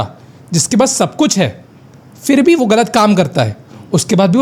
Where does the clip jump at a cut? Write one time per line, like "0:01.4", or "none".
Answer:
none